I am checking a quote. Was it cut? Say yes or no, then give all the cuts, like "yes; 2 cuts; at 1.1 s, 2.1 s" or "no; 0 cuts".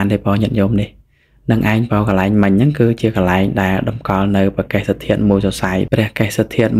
yes; 1 cut; at 5.9 s